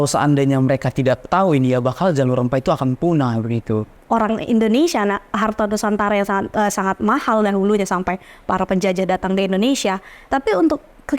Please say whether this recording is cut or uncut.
cut